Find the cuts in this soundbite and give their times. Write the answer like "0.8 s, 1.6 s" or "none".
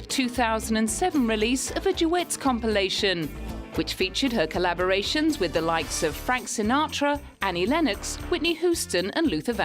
5.9 s